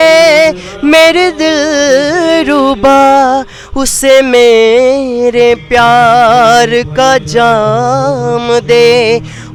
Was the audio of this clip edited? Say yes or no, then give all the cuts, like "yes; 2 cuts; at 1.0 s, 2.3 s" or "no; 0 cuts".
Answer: no; 0 cuts